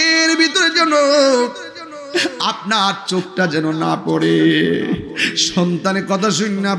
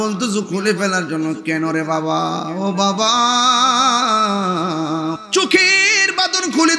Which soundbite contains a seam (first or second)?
second